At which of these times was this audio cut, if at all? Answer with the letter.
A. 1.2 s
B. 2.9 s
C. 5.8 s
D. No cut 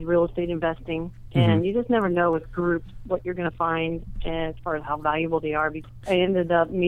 C